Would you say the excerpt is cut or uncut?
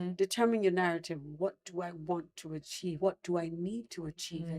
cut